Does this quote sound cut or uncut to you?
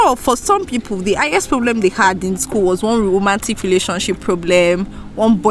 uncut